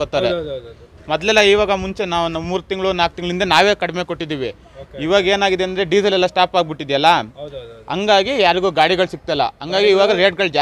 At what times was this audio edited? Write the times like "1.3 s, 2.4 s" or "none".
none